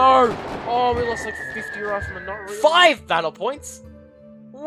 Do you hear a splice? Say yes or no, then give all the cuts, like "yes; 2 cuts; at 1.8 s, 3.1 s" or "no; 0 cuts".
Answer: yes; 1 cut; at 2.4 s